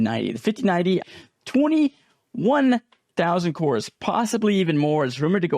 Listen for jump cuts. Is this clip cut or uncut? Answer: cut